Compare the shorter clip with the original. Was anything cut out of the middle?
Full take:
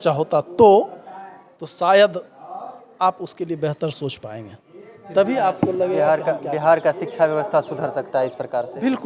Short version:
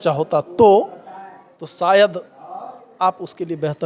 no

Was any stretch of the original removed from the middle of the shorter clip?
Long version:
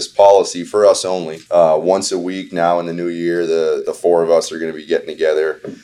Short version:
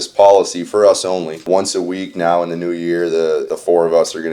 yes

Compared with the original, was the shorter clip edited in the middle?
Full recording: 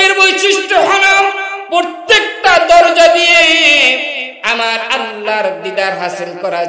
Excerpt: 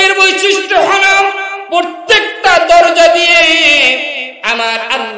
no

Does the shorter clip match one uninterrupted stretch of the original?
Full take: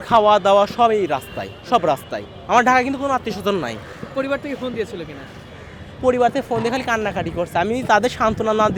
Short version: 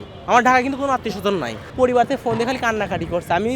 no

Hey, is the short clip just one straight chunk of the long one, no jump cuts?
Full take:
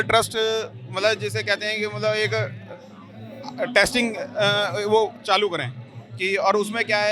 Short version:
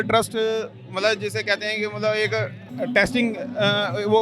no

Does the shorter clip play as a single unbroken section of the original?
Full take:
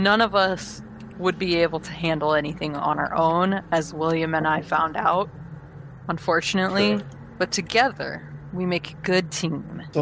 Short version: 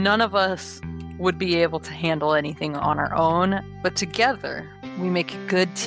no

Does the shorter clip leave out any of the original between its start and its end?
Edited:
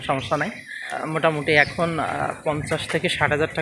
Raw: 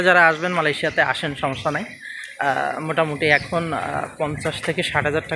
yes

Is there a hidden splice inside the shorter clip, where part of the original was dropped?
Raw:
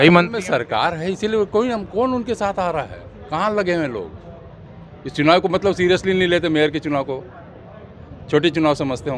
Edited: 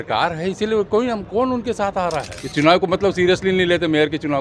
yes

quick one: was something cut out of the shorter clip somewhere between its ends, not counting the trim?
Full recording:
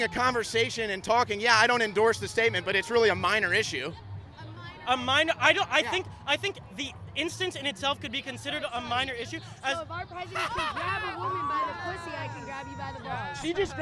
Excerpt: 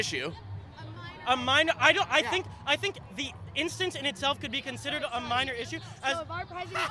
no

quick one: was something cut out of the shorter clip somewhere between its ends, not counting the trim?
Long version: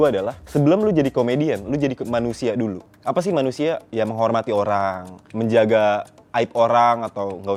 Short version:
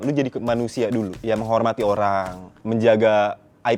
yes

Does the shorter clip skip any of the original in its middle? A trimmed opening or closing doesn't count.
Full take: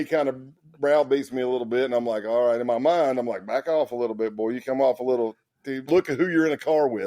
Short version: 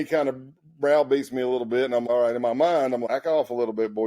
yes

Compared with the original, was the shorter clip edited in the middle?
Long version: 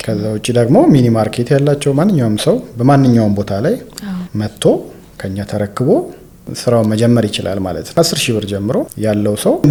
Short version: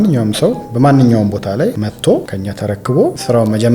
yes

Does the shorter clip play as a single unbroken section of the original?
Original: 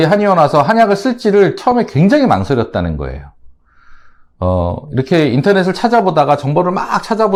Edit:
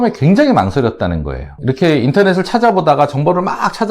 no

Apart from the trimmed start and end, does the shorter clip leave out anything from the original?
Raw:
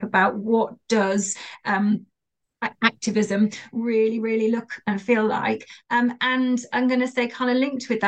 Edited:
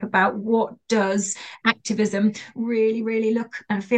yes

